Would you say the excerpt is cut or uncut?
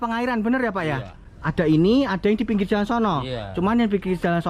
uncut